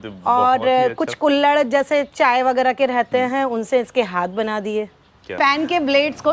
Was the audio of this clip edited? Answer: yes; 1 cut; at 5.3 s

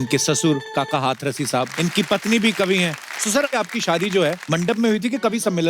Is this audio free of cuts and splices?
no; 3 cuts; at 1.7 s, 3.5 s, 4.4 s

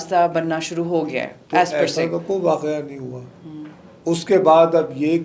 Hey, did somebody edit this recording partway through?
no; 0 cuts

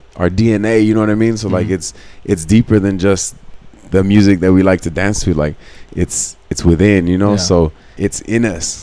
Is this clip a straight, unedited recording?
no; 1 cut; at 7.8 s

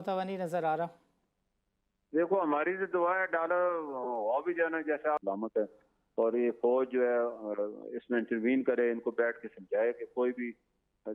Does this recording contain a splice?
yes; 1 cut; at 5.2 s

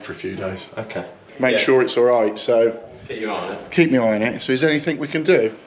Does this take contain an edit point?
yes; 1 cut; at 1.3 s

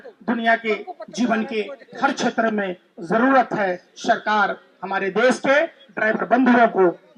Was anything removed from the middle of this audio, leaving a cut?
no; 0 cuts

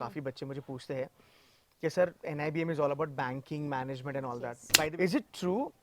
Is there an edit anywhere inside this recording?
yes; 1 cut; at 4.6 s

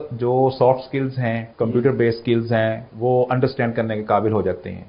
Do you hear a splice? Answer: yes; 2 cuts; at 1.5 s, 2.9 s

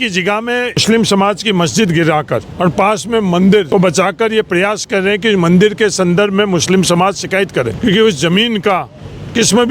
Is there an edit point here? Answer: yes; 4 cuts; at 0.8 s, 2.5 s, 3.7 s, 7.7 s

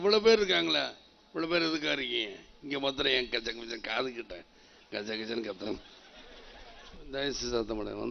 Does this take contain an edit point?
yes; 1 cut; at 6.9 s

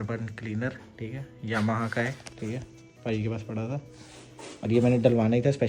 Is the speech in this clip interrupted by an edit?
no; 0 cuts

